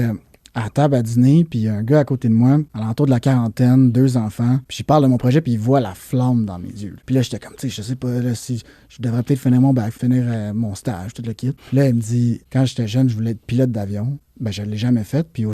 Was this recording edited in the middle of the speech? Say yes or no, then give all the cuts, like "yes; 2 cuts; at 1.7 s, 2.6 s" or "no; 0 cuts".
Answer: yes; 7 cuts; at 2.8 s, 4.7 s, 6.9 s, 9.9 s, 11.6 s, 12.4 s, 14.3 s